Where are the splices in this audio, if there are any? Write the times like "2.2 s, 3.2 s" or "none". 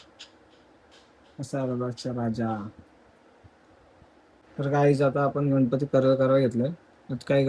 4.5 s